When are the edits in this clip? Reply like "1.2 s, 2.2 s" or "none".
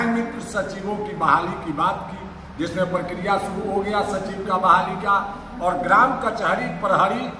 none